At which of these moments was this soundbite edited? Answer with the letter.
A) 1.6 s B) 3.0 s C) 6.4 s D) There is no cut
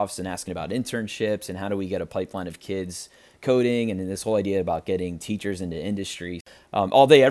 C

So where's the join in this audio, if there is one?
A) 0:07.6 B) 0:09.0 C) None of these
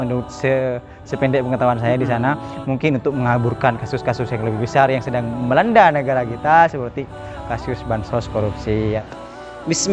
B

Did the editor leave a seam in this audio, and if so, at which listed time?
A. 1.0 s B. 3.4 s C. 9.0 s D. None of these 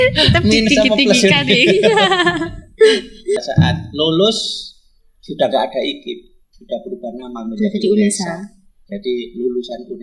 B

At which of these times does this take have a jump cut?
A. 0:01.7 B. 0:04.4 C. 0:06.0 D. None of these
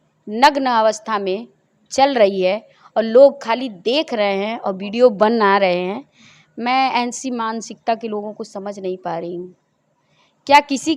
D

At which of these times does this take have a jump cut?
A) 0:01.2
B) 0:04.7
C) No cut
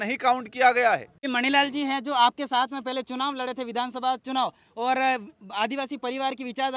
A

